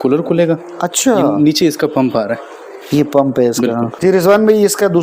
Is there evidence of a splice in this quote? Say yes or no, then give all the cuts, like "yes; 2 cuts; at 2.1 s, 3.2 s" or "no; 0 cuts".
yes; 1 cut; at 3.9 s